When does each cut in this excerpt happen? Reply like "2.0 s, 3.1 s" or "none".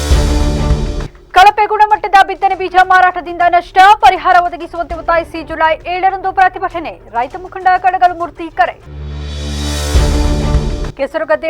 1.0 s